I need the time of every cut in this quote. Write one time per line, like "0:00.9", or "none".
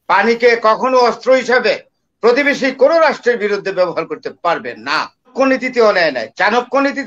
0:05.3